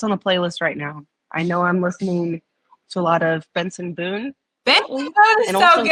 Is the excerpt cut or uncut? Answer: uncut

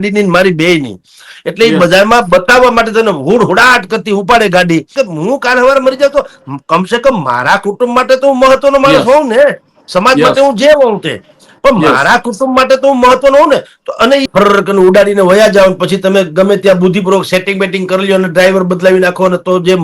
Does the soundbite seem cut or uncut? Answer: cut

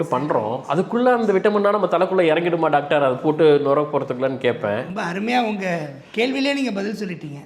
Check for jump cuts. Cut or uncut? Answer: uncut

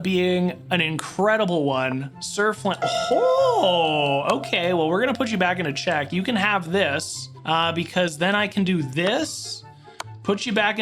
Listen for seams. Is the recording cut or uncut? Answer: uncut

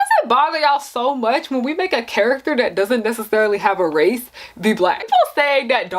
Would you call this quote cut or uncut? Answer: cut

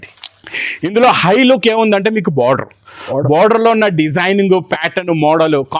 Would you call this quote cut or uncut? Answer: uncut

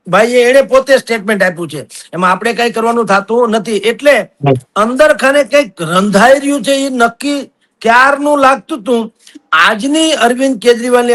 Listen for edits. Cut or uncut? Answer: uncut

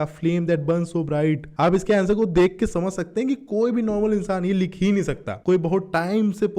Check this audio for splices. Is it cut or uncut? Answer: uncut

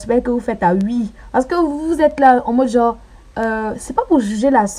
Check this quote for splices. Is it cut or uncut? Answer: uncut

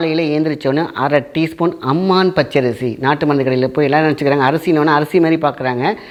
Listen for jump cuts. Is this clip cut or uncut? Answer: uncut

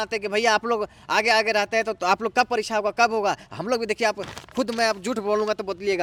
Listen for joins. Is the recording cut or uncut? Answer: uncut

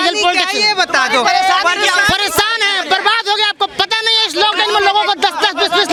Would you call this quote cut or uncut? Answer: uncut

